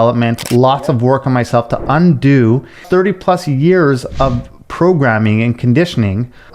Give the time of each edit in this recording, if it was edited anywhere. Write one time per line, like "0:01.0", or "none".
0:02.8